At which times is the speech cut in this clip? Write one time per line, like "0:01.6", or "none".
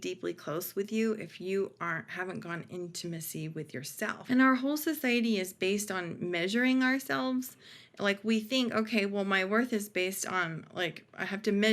0:04.2